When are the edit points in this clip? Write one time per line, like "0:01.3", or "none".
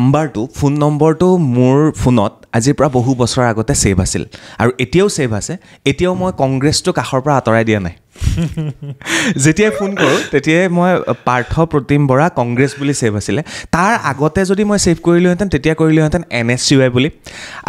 none